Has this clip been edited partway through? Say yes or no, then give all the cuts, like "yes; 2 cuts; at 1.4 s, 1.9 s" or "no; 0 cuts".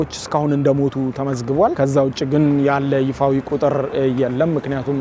no; 0 cuts